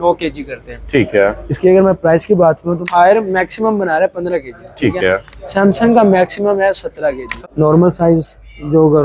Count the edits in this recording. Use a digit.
2